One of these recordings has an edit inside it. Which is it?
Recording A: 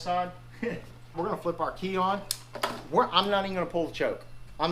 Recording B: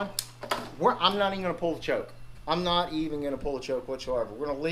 A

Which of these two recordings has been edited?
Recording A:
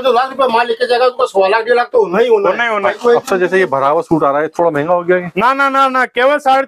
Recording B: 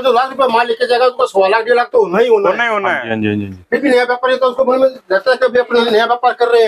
A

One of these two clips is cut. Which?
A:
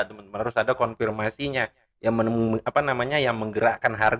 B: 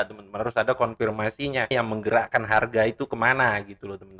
B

